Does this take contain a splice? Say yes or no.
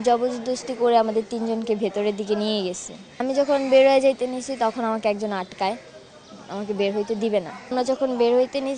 yes